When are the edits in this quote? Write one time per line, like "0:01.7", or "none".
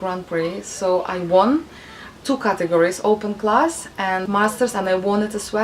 0:04.3

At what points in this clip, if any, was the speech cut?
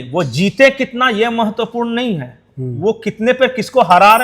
none

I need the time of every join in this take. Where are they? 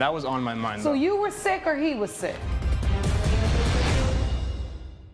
0:02.5

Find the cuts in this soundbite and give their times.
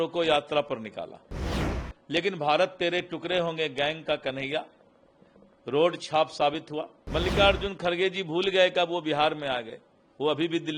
0:07.0

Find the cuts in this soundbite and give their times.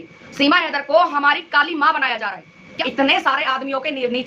0:02.7

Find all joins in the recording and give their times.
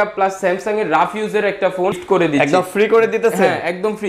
0:02.0

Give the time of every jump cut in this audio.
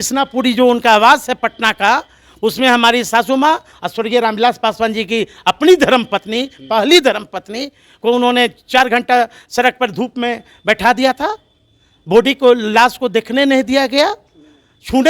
none

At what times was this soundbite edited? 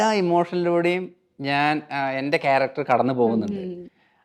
none

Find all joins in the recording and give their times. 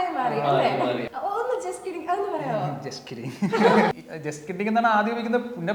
0:01.0
0:03.9

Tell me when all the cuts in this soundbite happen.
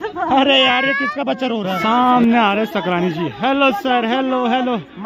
0:01.8

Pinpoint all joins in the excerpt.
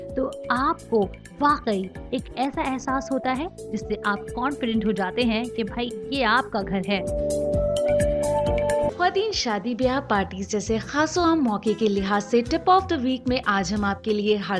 0:08.9

